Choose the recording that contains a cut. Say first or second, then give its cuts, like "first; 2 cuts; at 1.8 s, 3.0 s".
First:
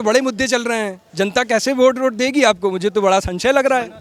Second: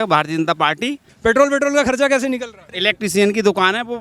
second; 2 cuts; at 1.1 s, 2.7 s